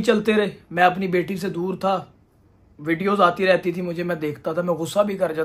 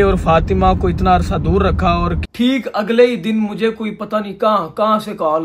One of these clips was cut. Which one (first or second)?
second